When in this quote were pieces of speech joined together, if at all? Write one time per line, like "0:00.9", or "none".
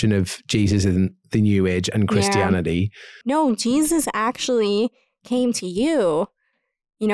0:03.2